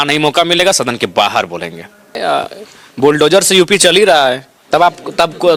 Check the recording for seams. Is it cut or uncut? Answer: uncut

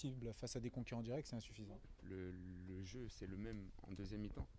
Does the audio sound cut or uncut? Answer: cut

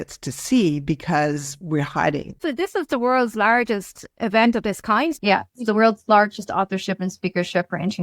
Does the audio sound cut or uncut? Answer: cut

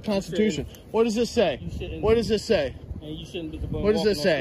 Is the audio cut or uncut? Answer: uncut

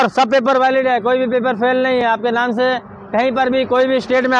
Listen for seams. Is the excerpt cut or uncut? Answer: uncut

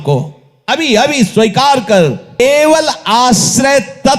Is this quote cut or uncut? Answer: cut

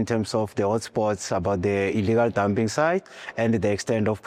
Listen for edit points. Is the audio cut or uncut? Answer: uncut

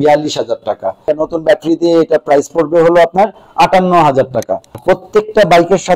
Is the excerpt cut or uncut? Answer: cut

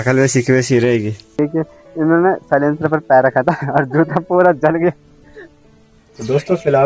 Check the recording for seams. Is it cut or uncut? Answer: cut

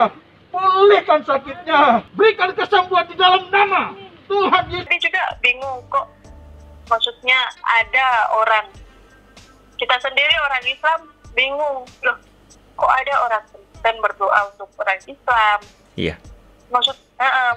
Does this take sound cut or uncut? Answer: cut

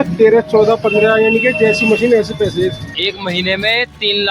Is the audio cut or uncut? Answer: cut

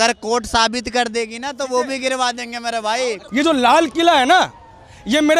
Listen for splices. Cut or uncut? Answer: cut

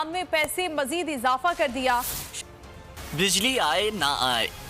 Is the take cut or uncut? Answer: cut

